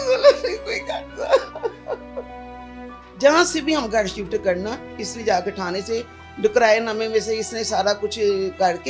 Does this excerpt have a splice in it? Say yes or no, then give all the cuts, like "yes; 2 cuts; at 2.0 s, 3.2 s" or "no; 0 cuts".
yes; 1 cut; at 2.9 s